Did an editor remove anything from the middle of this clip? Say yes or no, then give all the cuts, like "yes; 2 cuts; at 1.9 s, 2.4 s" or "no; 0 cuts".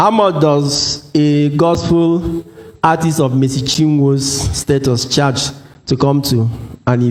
no; 0 cuts